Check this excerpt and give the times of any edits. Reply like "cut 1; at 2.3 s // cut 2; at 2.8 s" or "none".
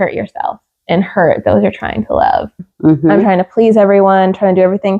cut 1; at 2.6 s